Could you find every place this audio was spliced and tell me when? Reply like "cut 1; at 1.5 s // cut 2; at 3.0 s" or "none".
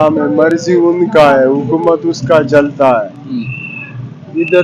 none